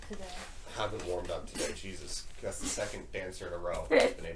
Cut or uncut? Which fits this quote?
uncut